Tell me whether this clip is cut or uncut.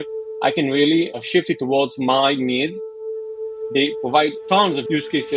cut